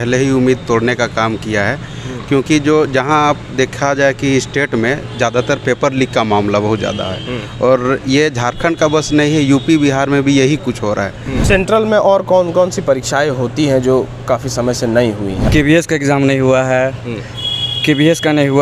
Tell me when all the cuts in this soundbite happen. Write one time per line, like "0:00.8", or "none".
0:11.4
0:15.4